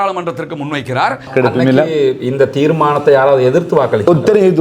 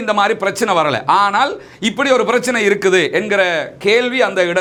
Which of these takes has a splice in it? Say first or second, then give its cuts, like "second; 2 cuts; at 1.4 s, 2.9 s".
first; 1 cut; at 1.3 s